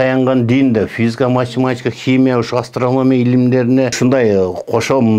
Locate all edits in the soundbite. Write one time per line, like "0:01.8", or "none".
0:04.0

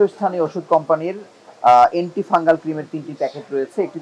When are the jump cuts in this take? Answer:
none

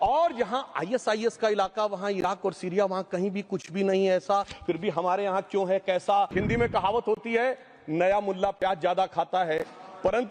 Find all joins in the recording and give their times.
0:06.3

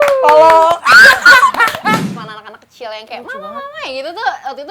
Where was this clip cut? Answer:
0:02.1

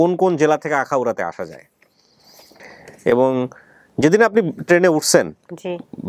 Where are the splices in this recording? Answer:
none

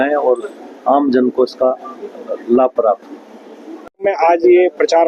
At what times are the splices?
0:04.0

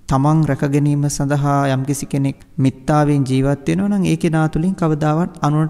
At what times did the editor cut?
0:02.4

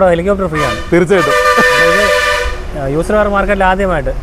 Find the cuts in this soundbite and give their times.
none

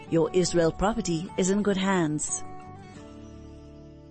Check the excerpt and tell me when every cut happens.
0:02.2

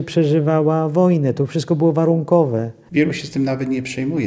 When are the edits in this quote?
0:02.8

